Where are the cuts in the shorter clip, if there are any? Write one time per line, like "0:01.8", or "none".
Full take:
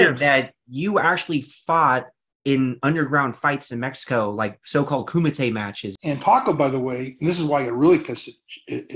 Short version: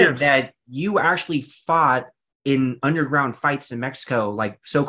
none

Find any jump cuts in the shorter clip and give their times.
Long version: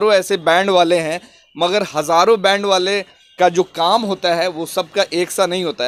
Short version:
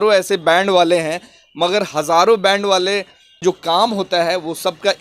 0:03.4

